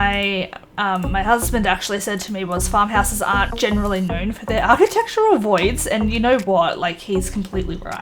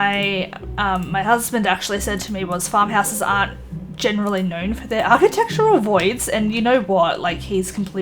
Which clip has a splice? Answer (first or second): first